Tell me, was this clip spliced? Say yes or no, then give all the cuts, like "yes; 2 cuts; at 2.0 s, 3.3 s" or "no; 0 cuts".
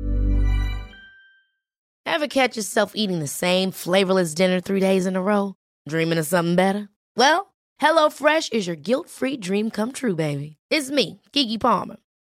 yes; 1 cut; at 1.9 s